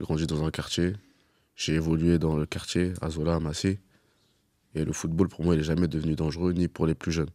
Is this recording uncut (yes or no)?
yes